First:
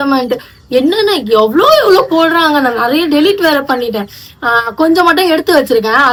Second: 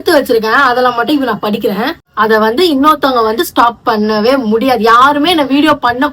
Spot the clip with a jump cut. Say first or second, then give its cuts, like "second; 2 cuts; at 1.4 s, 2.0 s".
second; 1 cut; at 2.0 s